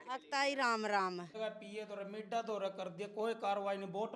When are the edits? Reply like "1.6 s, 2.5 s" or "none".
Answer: 1.3 s